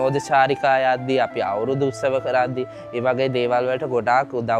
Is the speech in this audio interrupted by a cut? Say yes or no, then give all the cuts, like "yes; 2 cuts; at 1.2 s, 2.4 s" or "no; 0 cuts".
no; 0 cuts